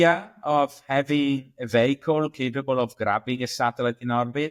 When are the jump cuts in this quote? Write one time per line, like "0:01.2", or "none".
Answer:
none